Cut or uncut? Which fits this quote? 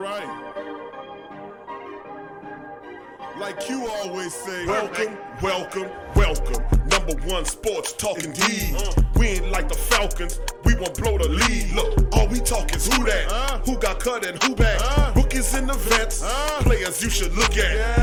uncut